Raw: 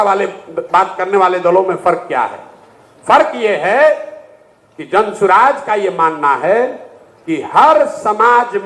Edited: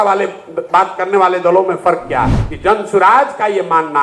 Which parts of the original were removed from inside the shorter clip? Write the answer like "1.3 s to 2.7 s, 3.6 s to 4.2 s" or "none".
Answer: 2.4 s to 4.7 s